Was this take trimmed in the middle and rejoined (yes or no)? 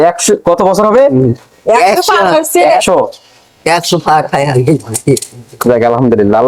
no